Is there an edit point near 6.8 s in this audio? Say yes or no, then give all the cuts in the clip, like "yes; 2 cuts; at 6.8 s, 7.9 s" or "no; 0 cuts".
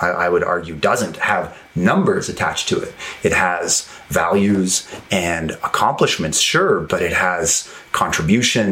yes; 1 cut; at 6.8 s